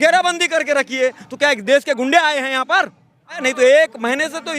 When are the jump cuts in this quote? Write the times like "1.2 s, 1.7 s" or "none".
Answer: 3.4 s